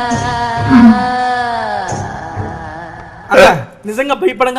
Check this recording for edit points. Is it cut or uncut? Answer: cut